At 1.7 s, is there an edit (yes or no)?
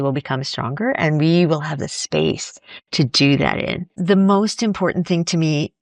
no